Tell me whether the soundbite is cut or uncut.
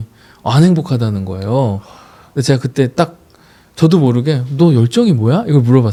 uncut